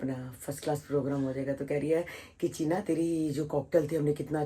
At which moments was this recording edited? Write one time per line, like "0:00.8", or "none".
none